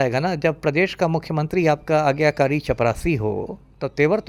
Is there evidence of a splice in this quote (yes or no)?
no